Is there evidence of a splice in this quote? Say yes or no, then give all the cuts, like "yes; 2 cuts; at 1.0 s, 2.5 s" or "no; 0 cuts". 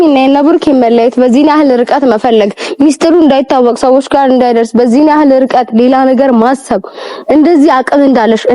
no; 0 cuts